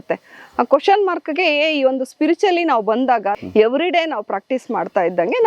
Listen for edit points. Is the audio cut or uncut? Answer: cut